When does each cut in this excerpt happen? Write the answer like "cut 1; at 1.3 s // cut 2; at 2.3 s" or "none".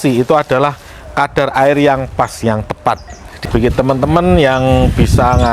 cut 1; at 3.4 s

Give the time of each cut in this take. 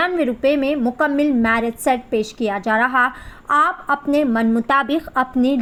none

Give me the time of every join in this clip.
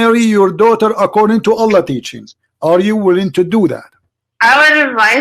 cut 1; at 3.9 s

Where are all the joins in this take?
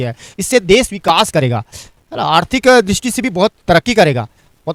none

